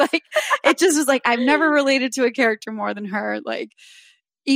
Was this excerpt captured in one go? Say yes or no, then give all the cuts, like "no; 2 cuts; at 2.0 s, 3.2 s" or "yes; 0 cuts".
yes; 0 cuts